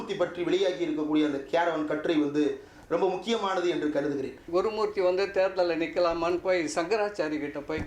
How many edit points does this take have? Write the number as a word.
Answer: one